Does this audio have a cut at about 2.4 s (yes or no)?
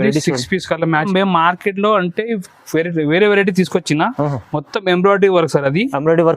no